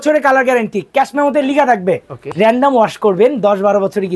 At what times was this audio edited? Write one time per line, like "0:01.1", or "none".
0:02.3